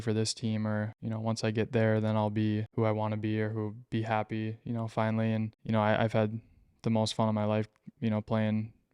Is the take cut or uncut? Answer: cut